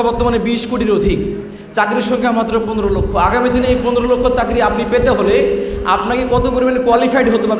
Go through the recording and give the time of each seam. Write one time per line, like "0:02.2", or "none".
none